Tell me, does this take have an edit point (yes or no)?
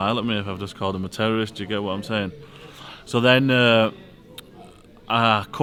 no